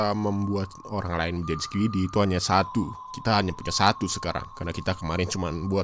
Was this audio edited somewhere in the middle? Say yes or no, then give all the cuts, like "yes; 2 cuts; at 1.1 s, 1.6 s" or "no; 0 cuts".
no; 0 cuts